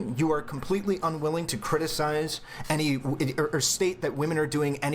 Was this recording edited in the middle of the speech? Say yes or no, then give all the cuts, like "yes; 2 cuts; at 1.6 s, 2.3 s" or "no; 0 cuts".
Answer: yes; 1 cut; at 2.4 s